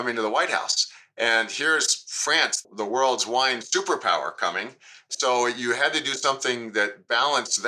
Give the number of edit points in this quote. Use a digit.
0